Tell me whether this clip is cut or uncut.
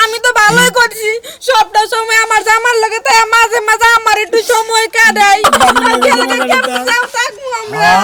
uncut